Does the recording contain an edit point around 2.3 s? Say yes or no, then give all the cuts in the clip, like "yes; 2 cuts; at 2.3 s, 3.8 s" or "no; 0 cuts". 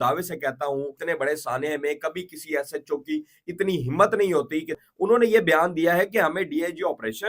no; 2 cuts; at 1.0 s, 4.8 s